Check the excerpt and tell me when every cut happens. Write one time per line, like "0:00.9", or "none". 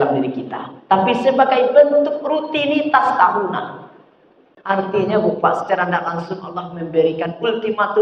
0:04.7